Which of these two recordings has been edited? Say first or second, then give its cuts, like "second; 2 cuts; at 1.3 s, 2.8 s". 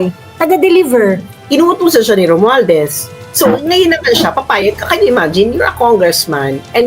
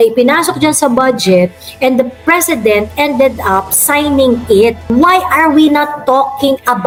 first; 1 cut; at 1.3 s